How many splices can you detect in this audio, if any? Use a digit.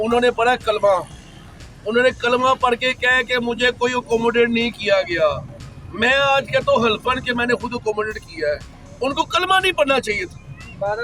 0